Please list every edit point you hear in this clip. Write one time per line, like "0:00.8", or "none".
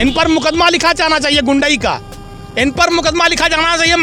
none